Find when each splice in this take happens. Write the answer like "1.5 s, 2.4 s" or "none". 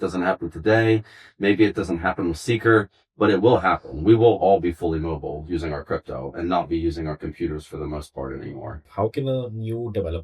8.8 s